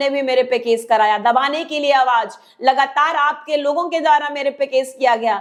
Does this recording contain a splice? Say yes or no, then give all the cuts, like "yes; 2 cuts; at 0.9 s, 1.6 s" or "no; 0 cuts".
no; 0 cuts